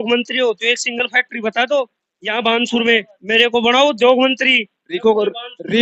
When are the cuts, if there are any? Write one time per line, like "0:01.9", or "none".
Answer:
none